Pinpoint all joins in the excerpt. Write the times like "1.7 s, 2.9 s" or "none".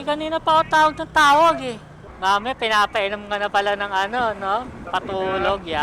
2.1 s, 4.7 s